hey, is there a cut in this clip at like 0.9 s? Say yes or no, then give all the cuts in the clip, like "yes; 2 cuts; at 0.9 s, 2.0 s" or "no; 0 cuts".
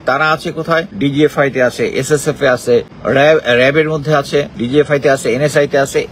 yes; 3 cuts; at 0.9 s, 2.9 s, 4.6 s